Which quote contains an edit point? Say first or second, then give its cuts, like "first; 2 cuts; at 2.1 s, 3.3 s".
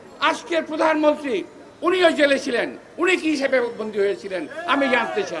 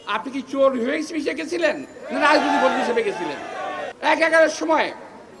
second; 1 cut; at 3.9 s